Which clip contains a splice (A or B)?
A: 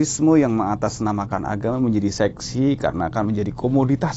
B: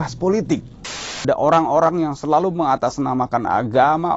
B